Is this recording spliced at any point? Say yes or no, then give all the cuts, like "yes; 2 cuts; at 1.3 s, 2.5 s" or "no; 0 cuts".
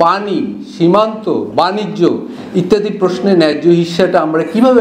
no; 0 cuts